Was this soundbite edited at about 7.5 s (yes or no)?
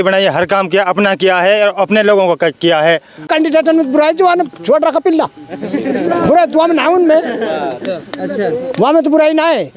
no